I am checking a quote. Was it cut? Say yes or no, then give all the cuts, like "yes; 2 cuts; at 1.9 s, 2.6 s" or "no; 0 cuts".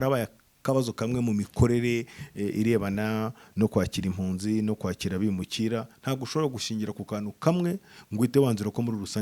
no; 0 cuts